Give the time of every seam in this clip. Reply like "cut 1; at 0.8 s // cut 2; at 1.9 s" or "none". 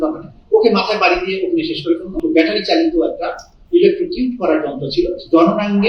cut 1; at 2.2 s